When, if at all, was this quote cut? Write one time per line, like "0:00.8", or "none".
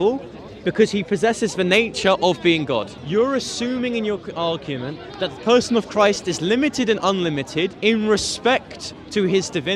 0:03.0
0:07.8